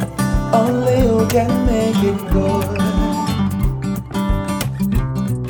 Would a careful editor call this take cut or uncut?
uncut